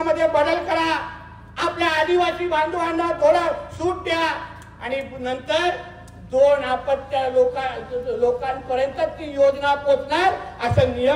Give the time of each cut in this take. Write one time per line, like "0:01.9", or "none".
none